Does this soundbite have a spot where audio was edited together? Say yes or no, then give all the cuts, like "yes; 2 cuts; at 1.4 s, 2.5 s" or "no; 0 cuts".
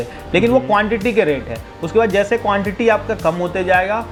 no; 0 cuts